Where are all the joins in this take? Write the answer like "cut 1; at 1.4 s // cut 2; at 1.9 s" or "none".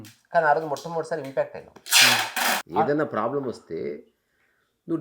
cut 1; at 2.6 s